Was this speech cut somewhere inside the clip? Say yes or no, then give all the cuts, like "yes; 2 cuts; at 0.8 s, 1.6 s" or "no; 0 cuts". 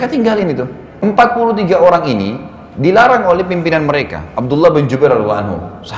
yes; 1 cut; at 1.0 s